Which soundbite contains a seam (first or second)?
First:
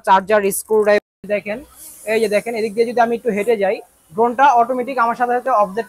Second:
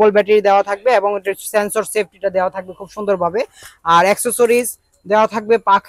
first